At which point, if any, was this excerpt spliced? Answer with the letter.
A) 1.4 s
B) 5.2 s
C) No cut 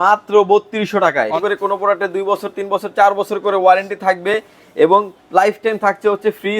A